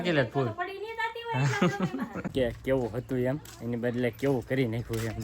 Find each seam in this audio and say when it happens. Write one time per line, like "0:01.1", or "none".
0:02.3